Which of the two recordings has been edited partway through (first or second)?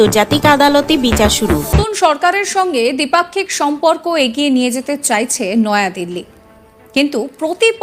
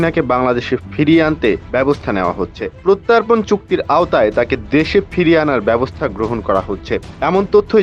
first